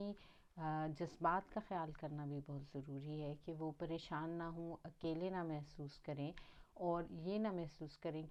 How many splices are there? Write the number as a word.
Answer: zero